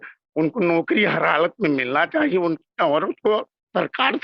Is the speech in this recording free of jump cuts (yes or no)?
yes